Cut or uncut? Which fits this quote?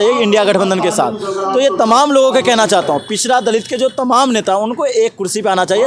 uncut